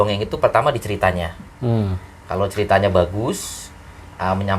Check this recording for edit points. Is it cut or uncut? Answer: uncut